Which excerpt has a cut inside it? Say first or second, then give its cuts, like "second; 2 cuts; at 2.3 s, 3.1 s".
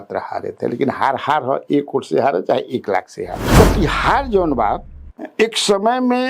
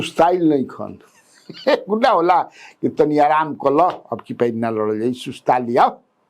first; 1 cut; at 3.4 s